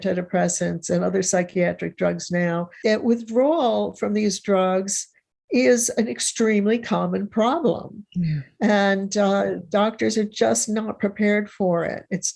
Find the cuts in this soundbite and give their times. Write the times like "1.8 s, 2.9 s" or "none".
2.7 s